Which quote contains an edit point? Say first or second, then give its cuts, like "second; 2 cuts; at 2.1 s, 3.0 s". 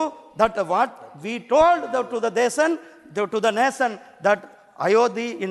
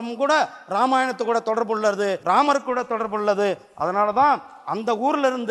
second; 1 cut; at 2.2 s